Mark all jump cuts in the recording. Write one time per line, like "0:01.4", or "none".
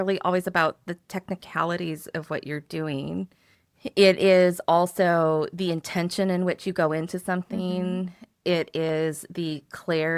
none

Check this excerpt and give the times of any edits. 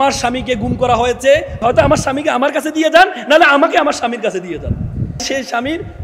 0:01.6
0:05.2

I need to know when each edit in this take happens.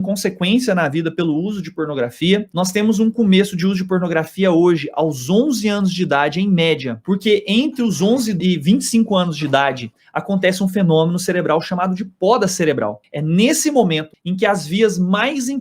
0:06.9
0:08.4
0:10.0
0:13.1

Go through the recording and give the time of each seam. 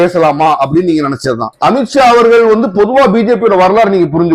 0:01.5

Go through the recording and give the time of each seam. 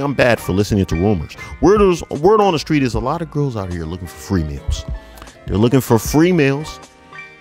none

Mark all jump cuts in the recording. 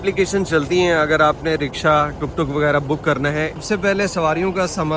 0:03.6

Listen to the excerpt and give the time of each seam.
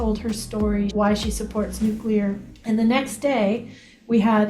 0:00.9
0:02.5

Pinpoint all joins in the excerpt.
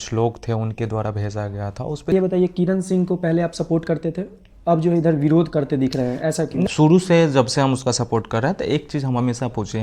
0:02.1
0:06.7

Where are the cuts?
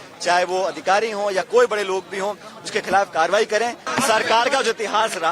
0:03.8

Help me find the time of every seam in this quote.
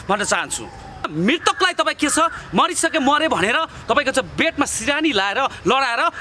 0:01.1

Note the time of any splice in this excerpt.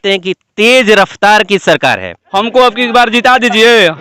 0:02.1

